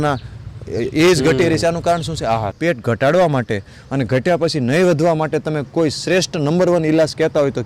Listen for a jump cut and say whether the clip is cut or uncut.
cut